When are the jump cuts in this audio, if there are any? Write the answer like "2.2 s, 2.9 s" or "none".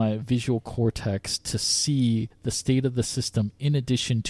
none